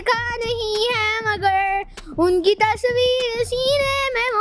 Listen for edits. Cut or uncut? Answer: uncut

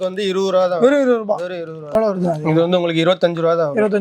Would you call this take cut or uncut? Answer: cut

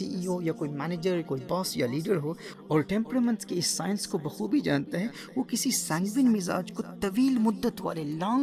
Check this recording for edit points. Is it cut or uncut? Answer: uncut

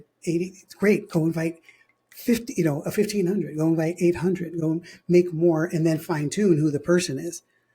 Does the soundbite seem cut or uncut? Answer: uncut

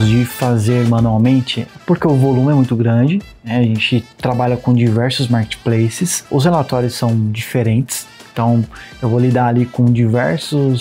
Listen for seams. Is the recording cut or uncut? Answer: uncut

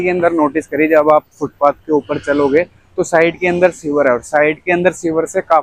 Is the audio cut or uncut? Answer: uncut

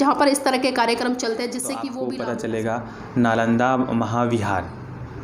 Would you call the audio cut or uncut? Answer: cut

